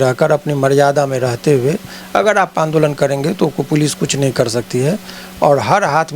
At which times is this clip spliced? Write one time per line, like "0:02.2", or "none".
none